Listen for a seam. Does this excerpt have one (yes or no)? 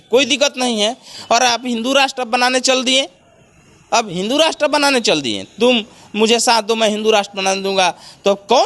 yes